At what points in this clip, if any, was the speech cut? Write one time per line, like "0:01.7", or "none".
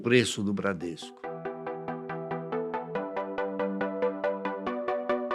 0:01.6